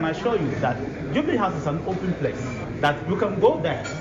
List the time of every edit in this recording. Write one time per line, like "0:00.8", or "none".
none